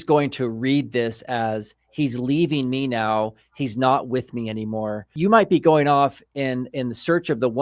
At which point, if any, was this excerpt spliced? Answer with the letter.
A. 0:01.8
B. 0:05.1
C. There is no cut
B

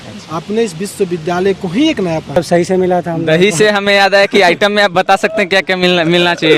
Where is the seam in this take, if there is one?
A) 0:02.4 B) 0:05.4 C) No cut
A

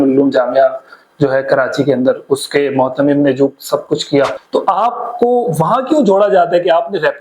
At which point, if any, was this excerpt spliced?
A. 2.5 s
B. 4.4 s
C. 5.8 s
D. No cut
B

